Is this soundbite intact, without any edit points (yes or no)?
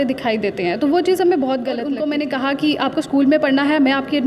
no